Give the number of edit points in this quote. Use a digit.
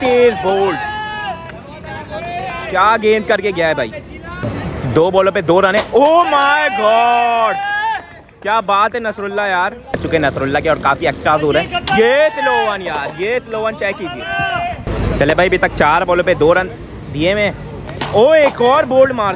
3